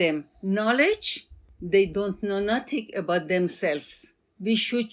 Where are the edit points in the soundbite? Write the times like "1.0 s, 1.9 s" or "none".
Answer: none